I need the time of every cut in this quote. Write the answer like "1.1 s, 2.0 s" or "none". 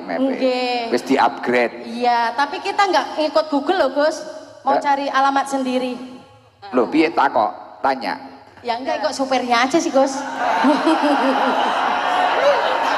none